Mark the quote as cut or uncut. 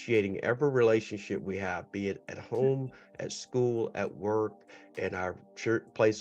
uncut